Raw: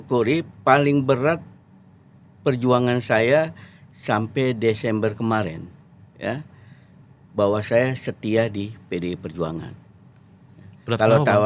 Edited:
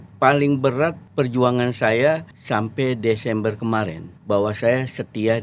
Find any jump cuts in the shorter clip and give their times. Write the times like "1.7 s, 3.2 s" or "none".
1.0 s, 2.3 s, 4.1 s